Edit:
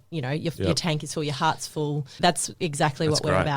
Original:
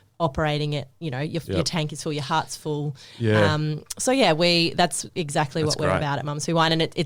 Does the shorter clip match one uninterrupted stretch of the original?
no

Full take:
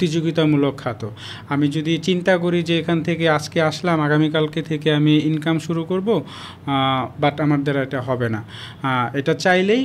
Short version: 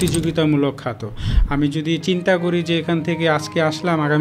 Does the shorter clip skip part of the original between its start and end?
no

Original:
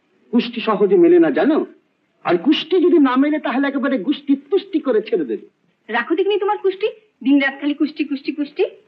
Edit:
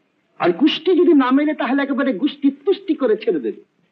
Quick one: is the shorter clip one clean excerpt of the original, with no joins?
yes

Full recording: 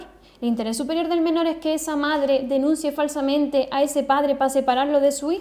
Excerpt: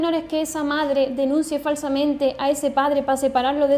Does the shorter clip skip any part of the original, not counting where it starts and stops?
no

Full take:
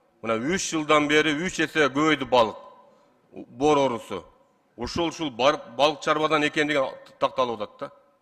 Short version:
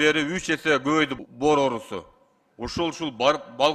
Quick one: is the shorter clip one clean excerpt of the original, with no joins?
no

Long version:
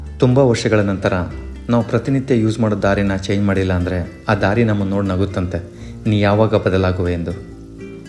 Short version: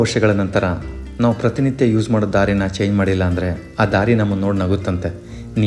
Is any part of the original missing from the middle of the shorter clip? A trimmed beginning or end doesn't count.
no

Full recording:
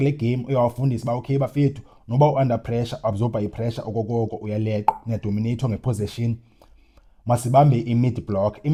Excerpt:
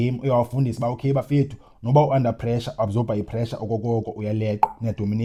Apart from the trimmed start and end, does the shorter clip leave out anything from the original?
no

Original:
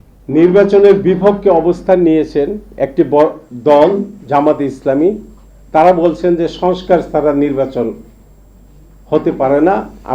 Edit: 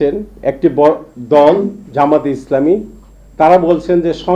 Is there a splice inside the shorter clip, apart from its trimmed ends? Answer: no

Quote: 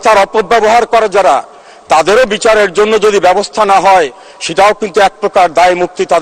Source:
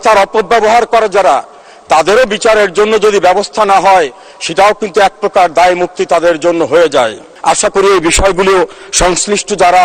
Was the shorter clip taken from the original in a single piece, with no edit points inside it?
yes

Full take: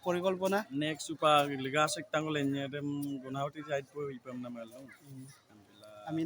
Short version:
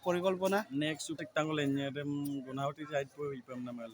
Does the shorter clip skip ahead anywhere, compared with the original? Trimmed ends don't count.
yes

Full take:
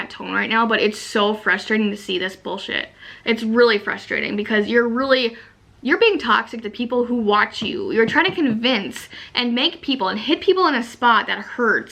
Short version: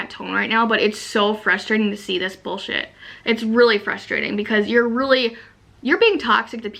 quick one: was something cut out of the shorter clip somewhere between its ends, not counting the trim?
no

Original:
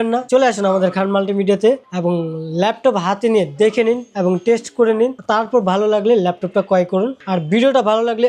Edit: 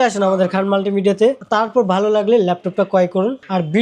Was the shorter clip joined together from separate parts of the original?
yes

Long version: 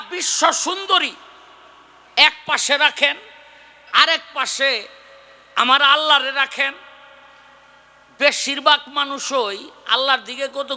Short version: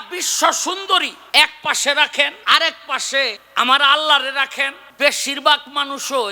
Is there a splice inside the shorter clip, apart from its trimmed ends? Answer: yes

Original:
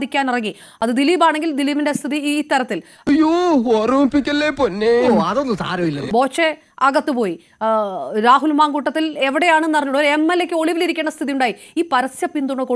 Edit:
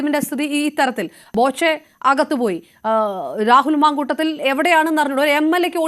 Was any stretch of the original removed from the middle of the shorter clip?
yes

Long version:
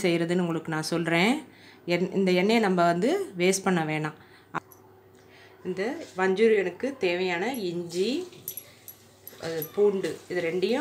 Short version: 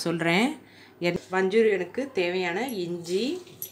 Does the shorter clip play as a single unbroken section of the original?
no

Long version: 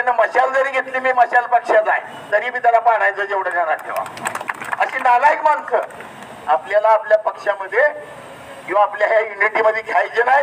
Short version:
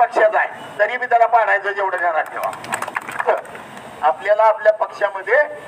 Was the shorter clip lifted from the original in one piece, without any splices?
no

